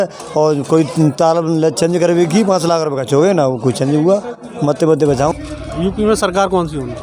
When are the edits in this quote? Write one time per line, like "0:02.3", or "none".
0:05.3